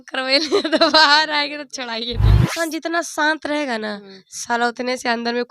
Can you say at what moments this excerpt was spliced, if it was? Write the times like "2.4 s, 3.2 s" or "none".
2.5 s